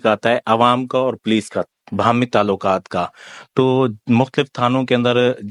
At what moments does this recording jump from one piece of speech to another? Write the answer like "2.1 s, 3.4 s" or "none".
none